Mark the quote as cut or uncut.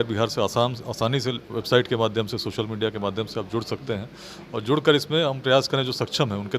uncut